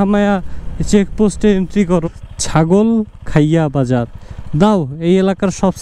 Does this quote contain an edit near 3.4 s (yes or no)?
no